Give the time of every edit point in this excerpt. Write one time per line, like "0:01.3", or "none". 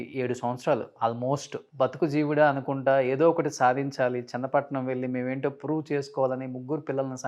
0:01.6